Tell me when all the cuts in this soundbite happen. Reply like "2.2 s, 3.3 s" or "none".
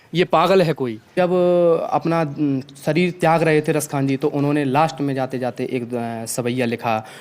1.0 s